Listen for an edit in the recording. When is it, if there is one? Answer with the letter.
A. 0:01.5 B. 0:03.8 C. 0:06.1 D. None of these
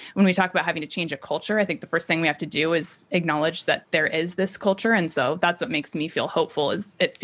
B